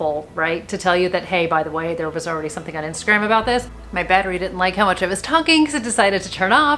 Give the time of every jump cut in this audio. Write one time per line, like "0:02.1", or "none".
0:03.7